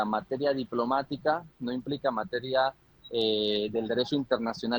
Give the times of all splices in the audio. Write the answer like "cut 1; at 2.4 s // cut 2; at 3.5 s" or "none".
none